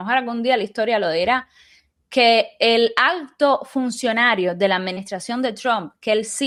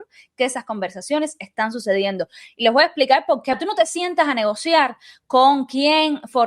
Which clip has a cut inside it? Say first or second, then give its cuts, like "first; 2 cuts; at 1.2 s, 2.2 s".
second; 1 cut; at 3.6 s